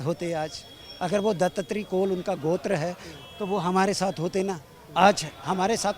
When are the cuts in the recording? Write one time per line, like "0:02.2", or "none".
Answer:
none

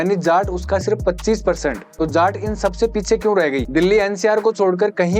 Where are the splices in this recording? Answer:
0:01.8
0:03.7

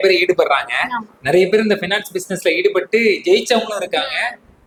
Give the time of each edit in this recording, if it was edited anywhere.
none

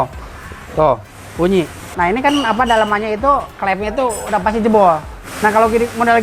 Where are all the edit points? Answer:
0:01.9

